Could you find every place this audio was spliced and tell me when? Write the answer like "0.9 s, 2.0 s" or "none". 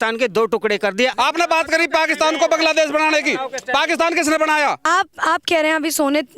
1.1 s, 4.8 s